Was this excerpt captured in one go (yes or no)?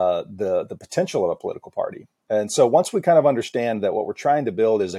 yes